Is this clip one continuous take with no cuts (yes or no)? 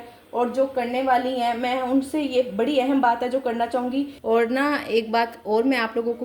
no